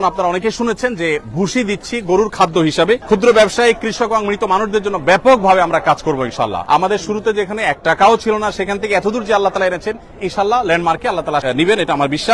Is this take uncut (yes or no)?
no